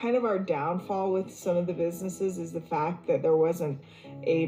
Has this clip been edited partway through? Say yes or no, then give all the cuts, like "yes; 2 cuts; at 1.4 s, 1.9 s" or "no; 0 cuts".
no; 0 cuts